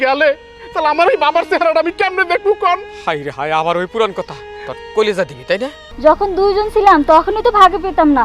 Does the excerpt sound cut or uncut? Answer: cut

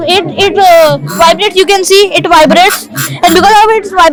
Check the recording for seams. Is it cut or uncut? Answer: uncut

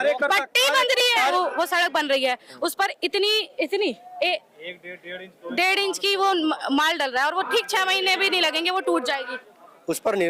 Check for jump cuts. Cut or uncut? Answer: cut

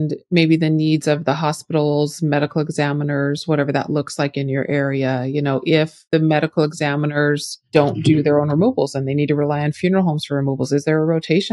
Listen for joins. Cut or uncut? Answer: cut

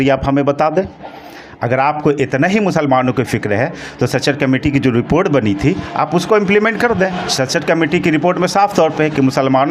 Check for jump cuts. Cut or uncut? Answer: uncut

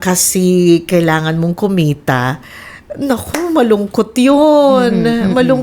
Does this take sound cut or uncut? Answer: uncut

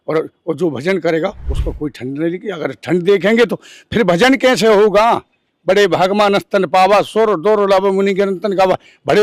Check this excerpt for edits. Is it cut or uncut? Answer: uncut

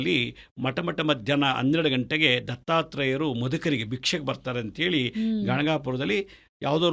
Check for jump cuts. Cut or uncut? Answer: uncut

